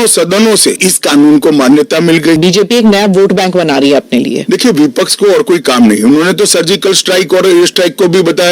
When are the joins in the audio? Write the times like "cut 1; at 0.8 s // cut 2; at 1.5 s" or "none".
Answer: cut 1; at 0.8 s // cut 2; at 2.4 s